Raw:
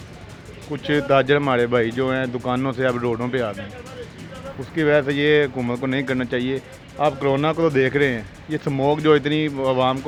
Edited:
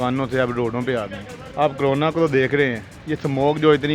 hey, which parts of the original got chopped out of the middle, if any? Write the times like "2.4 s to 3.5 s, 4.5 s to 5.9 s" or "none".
3.8 s to 6.8 s